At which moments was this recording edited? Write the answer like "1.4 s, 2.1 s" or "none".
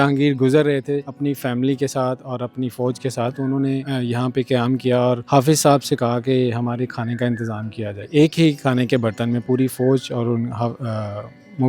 1.1 s, 3.8 s, 5.2 s, 8.1 s